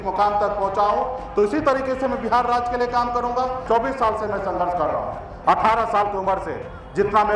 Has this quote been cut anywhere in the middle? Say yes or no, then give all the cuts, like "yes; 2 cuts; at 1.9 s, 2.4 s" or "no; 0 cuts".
yes; 1 cut; at 3.6 s